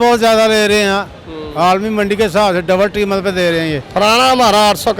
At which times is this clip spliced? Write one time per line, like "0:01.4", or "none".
0:03.8